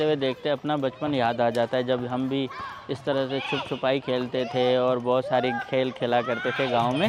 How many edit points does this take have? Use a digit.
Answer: 0